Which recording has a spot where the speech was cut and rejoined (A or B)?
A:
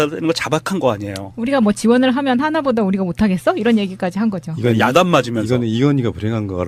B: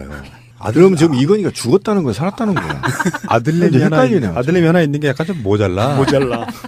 A